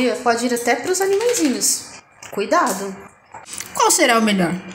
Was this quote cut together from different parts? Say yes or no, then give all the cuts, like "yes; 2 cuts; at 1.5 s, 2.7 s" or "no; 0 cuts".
yes; 1 cut; at 3.4 s